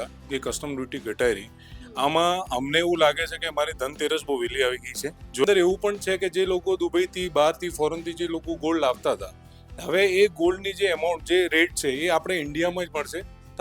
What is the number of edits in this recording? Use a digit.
1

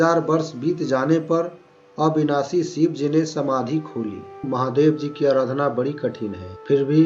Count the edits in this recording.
1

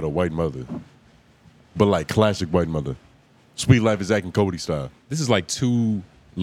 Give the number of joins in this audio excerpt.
1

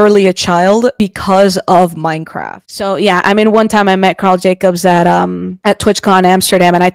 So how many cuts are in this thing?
1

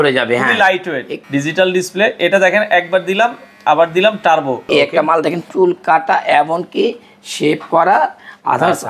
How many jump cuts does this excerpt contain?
2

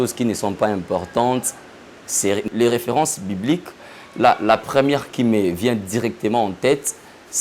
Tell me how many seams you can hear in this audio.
1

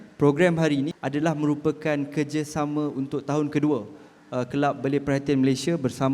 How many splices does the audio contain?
1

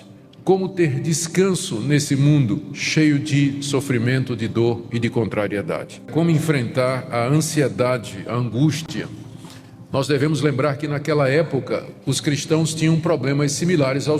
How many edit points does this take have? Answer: 1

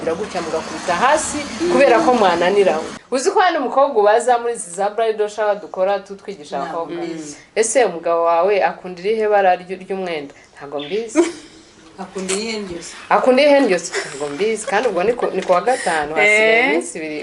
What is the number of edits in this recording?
1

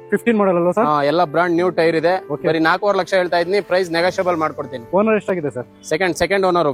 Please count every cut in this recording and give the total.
0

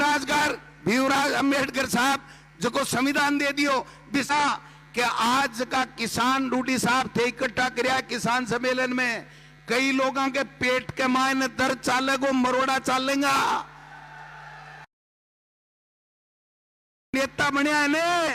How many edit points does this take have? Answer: 1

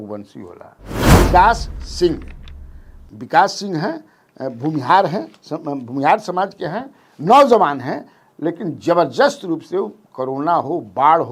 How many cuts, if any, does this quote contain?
1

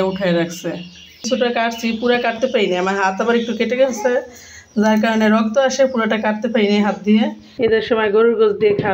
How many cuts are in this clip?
2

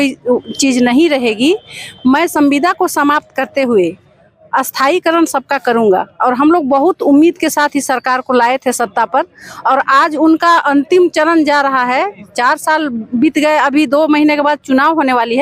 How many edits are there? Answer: 0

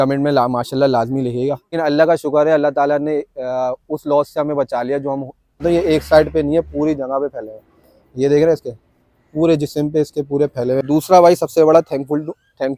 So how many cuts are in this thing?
3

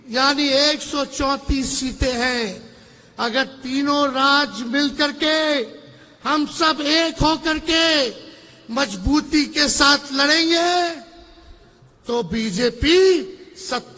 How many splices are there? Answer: 0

